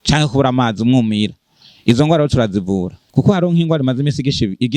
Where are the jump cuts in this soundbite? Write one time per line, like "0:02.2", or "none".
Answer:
0:03.0